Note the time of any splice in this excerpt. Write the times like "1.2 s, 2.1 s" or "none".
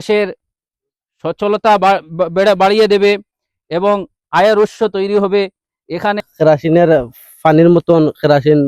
6.3 s